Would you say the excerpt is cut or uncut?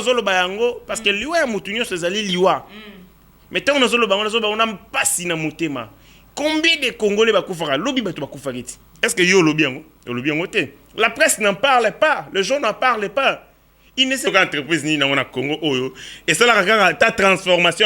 cut